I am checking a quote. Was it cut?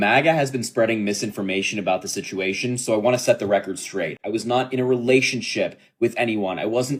no; 0 cuts

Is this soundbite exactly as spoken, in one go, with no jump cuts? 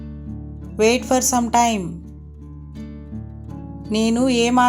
no; 3 cuts; at 0.8 s, 2.2 s, 3.6 s

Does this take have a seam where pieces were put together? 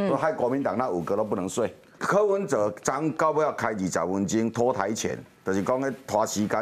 yes; 1 cut; at 1.9 s

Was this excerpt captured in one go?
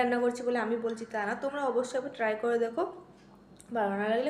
yes; 0 cuts

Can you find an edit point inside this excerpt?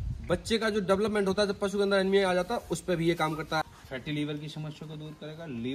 yes; 1 cut; at 3.7 s

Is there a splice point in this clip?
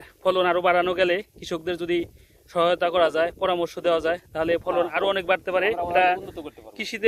no; 0 cuts

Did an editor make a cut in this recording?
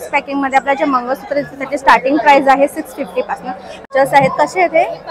yes; 1 cut; at 3.9 s

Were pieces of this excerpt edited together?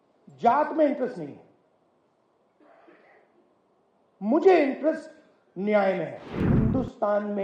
yes; 1 cut; at 6.5 s

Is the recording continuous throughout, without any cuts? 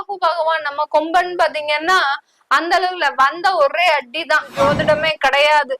no; 1 cut; at 4.5 s

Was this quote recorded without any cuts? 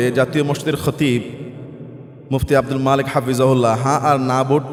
yes; 0 cuts

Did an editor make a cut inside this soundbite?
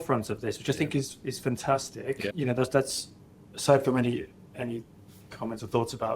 yes; 1 cut; at 2.3 s

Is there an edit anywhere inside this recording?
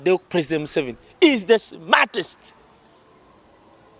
no; 0 cuts

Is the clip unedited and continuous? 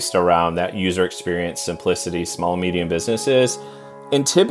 yes; 0 cuts

